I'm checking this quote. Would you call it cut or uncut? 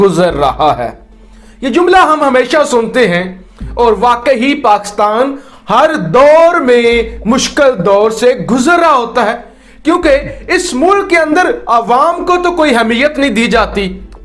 uncut